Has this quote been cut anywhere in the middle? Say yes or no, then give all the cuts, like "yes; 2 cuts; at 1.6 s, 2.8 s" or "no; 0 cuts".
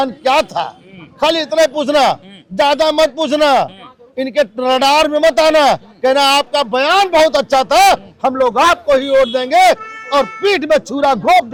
no; 0 cuts